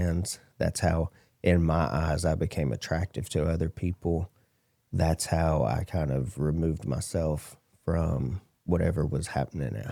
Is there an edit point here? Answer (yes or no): no